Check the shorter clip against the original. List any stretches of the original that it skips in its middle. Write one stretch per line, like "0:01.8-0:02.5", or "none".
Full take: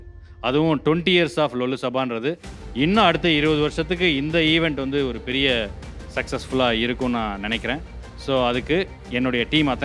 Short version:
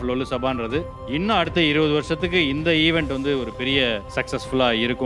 0:02.5-0:02.7
0:05.8-0:06.1